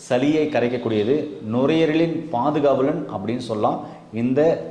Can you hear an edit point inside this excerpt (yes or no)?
no